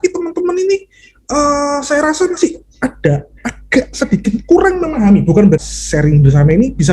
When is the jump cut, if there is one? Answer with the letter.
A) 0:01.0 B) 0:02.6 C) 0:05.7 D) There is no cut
C